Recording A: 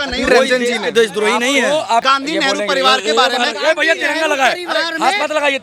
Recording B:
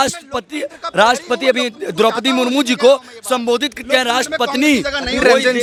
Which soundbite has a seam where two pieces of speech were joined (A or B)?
A